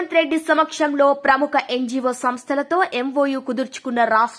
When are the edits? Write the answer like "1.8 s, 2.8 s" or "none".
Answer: none